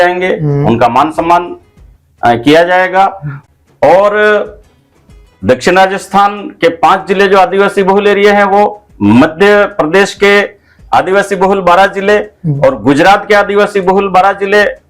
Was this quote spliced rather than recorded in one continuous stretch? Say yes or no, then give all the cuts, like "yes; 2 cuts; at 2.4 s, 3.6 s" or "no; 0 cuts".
yes; 1 cut; at 3.3 s